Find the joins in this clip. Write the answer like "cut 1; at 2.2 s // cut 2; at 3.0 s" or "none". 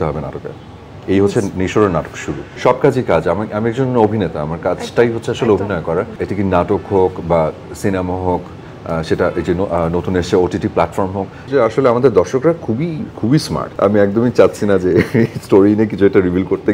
cut 1; at 2.5 s // cut 2; at 6.2 s // cut 3; at 11.4 s // cut 4; at 13.6 s